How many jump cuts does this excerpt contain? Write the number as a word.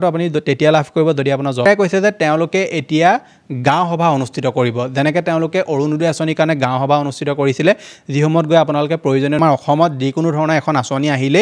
two